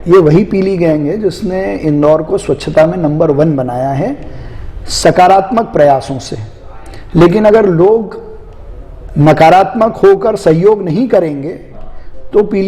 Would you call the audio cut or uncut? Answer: uncut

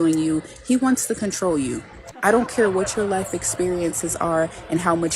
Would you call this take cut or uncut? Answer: cut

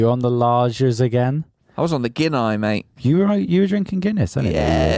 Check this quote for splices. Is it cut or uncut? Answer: cut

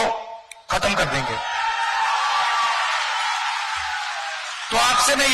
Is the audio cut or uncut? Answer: uncut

